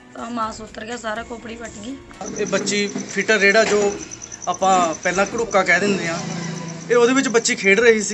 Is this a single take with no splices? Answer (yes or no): no